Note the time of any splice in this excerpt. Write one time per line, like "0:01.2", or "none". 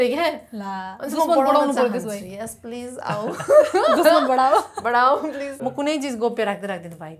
0:05.5